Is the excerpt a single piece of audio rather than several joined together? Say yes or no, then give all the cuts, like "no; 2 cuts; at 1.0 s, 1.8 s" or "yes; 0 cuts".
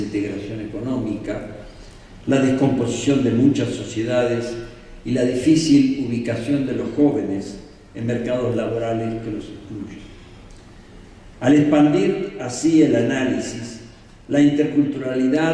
yes; 0 cuts